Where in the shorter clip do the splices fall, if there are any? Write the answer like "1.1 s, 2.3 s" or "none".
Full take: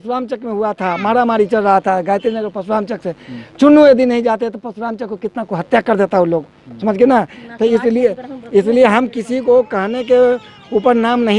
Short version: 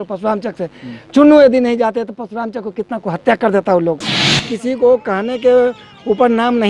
4.4 s